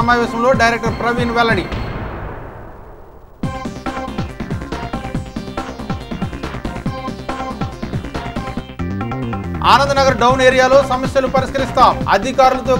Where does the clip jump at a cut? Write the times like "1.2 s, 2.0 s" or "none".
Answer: 9.6 s